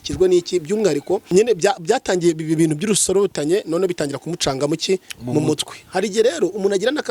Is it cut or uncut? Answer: cut